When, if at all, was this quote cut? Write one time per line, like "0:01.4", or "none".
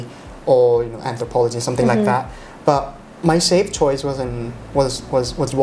none

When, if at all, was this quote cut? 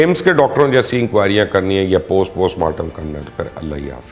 none

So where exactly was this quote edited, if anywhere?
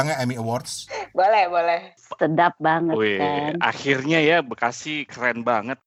none

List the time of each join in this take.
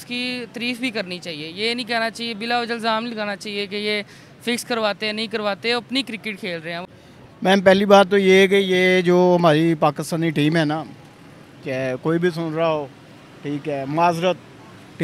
0:06.8

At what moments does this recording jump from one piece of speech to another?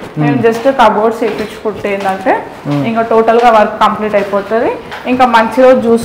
none

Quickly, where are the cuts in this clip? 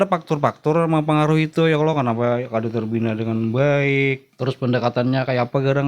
0:04.3

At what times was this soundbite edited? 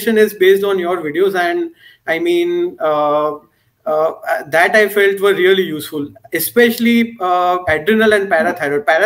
none

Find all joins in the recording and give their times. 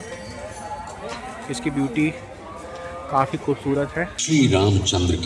0:04.2

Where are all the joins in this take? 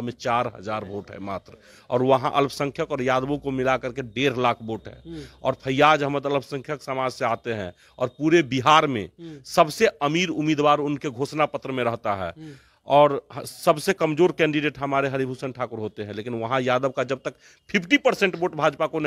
none

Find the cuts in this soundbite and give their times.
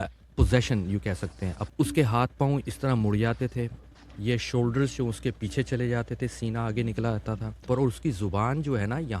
0:01.6
0:07.6

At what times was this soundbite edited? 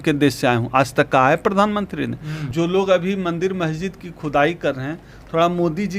0:02.4

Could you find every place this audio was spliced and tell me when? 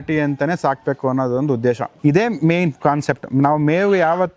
0:01.9

